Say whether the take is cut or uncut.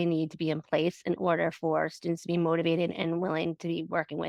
uncut